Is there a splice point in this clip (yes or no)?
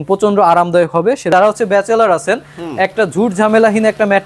yes